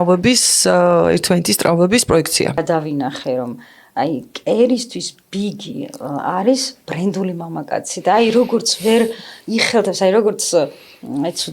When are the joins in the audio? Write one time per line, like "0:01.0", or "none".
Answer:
0:02.6